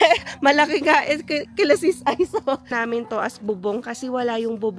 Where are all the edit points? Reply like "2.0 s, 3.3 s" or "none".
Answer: 2.7 s